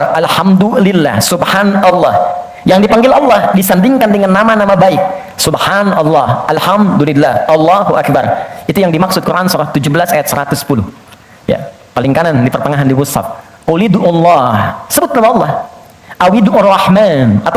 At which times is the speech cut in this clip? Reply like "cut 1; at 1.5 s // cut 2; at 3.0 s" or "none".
none